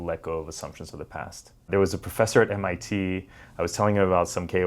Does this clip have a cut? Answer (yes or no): yes